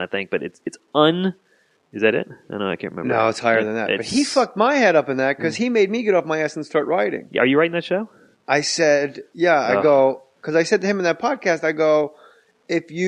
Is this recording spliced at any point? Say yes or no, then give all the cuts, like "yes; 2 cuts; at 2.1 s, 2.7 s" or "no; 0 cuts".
no; 0 cuts